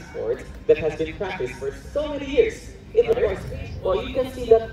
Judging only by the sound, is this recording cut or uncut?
cut